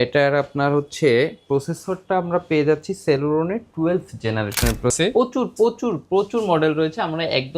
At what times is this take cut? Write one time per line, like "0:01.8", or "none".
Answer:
0:04.9